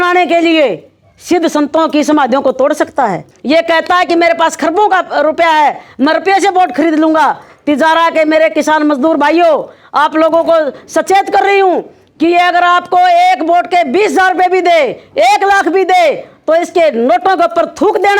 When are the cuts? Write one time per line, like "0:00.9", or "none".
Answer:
0:03.3